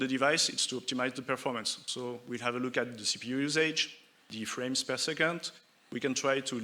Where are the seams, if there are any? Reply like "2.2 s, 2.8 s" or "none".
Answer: none